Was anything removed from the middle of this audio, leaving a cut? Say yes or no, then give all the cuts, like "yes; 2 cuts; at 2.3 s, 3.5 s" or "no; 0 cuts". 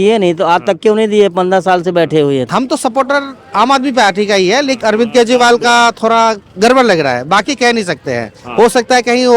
yes; 2 cuts; at 2.5 s, 4.7 s